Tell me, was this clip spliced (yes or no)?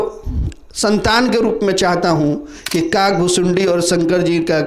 yes